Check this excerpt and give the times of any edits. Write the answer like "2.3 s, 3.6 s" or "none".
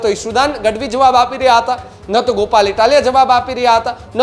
none